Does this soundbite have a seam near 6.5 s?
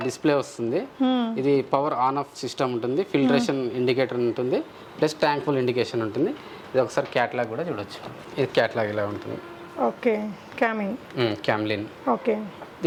no; 0 cuts

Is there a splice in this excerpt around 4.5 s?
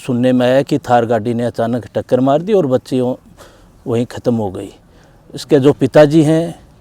no; 0 cuts

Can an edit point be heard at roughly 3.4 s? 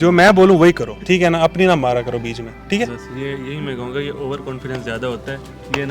no; 1 cut; at 0.9 s

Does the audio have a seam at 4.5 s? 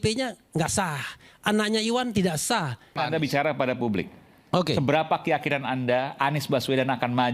no; 1 cut; at 2.9 s

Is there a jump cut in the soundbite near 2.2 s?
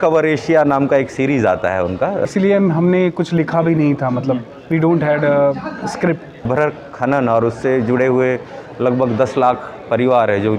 yes; 2 cuts; at 2.2 s, 6.5 s

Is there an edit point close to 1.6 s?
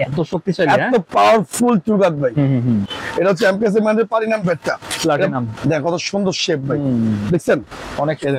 no; 2 cuts; at 2.9 s, 5.5 s

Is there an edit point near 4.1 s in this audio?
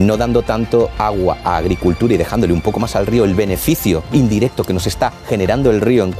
yes; 2 cuts; at 0.9 s, 4.1 s

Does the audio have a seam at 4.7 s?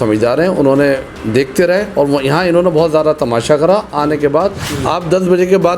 yes; 1 cut; at 4.7 s

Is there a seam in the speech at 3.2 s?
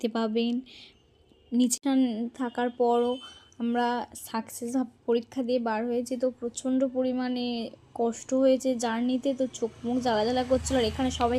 no; 1 cut; at 1.7 s

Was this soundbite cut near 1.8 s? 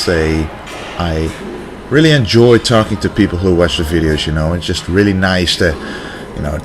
yes; 1 cut; at 1.8 s

